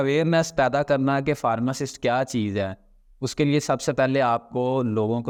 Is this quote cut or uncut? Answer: uncut